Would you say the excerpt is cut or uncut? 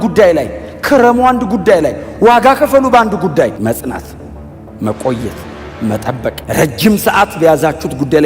cut